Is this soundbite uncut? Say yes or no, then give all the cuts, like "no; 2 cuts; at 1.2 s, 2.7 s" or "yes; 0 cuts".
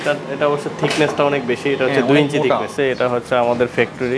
no; 1 cut; at 2.7 s